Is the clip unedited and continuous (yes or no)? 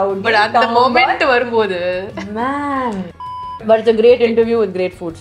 no